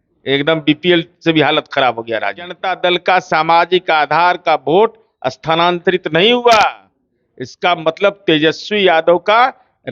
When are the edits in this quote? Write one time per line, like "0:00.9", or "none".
0:02.6